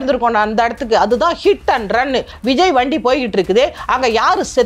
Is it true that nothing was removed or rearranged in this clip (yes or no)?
no